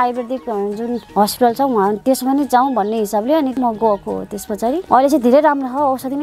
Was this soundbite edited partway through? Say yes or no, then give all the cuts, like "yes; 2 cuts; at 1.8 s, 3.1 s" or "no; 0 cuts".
yes; 3 cuts; at 1.1 s, 3.5 s, 4.8 s